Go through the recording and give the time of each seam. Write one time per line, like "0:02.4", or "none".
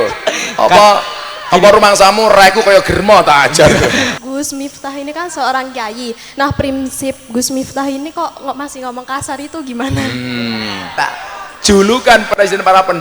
0:04.1
0:10.8